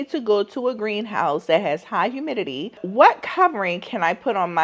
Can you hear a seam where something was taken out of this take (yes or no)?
yes